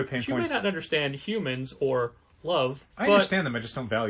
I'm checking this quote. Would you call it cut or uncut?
cut